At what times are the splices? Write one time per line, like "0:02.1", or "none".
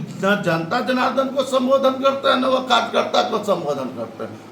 none